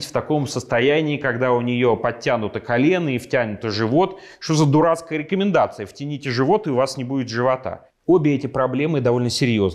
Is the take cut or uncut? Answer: cut